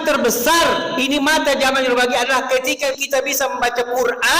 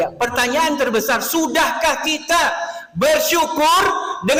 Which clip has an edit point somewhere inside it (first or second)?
first